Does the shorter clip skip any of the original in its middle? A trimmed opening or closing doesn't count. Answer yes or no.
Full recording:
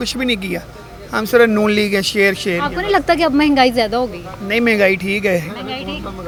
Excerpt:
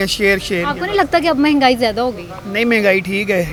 no